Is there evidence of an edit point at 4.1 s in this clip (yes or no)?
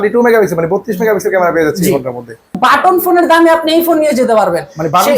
no